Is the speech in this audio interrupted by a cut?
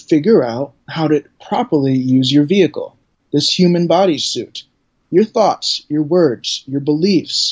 no; 0 cuts

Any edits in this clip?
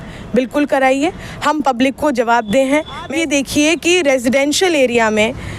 yes; 1 cut; at 3.1 s

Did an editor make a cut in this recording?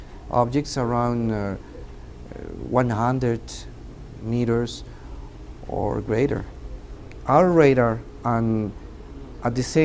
no; 0 cuts

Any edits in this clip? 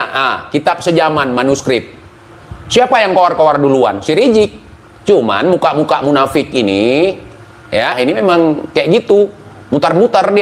no; 0 cuts

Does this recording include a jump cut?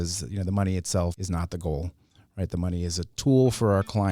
yes; 1 cut; at 1.2 s

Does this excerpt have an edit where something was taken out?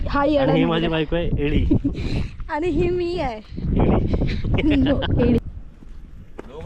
yes; 1 cut; at 5.4 s

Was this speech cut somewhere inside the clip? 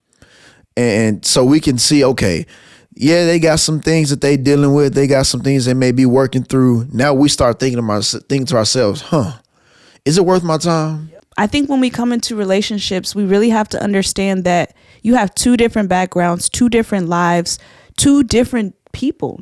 yes; 1 cut; at 10.9 s

